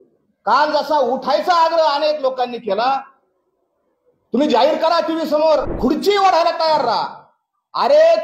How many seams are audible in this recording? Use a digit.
1